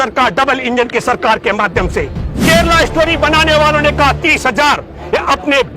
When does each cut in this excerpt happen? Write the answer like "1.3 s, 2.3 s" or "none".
2.3 s